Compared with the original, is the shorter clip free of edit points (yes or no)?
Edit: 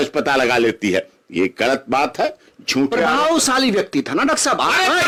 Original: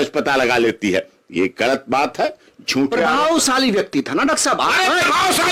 yes